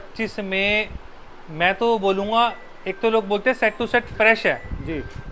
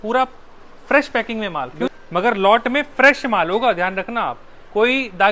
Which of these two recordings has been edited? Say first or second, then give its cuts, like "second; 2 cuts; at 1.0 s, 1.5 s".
second; 1 cut; at 1.9 s